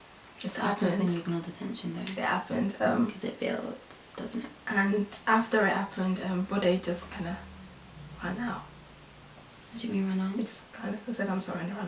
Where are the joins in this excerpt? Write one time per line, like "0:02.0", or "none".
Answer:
none